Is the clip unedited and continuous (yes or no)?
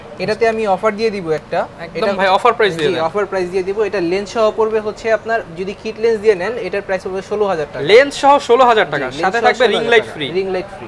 yes